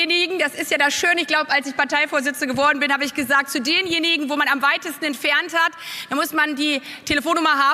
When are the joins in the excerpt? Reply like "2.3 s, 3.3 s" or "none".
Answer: none

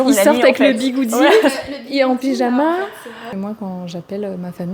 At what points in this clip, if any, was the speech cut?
3.4 s

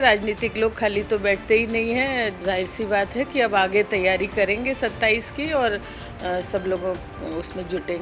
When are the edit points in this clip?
2.4 s

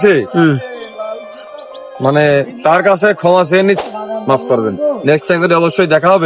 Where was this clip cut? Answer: 3.9 s

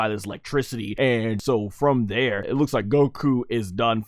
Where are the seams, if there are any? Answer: 1.2 s, 2.4 s

